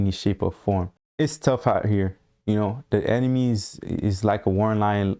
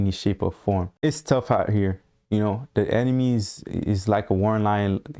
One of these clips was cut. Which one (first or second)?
second